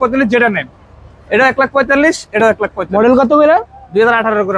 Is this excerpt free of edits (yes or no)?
yes